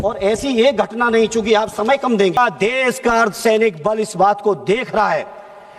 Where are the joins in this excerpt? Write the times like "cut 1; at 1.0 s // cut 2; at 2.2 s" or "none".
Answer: cut 1; at 2.4 s